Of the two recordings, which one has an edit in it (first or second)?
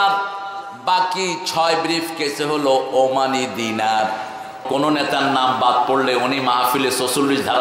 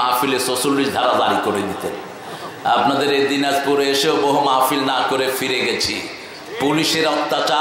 first